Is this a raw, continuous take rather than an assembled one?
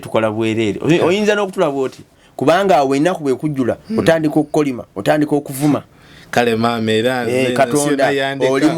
no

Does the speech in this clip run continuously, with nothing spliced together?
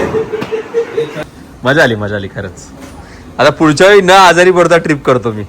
no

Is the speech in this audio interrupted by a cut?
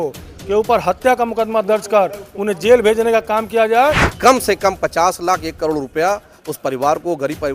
yes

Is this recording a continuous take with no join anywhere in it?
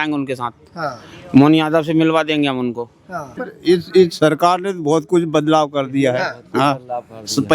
no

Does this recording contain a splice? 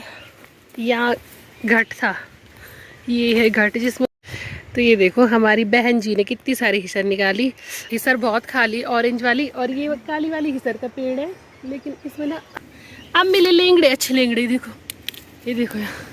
yes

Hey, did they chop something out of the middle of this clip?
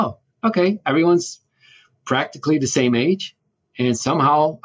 no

